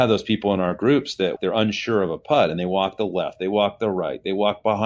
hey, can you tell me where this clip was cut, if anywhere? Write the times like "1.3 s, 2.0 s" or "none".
1.4 s